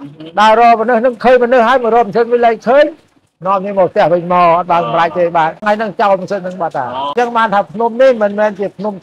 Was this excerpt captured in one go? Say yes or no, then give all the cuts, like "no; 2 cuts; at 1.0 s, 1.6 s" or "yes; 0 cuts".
no; 2 cuts; at 5.6 s, 7.1 s